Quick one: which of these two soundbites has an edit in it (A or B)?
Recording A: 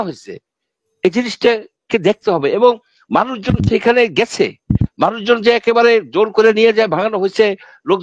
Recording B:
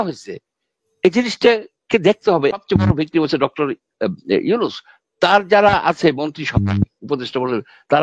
B